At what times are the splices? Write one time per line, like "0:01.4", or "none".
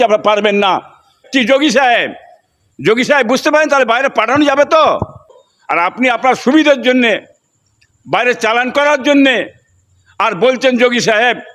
0:01.2
0:05.3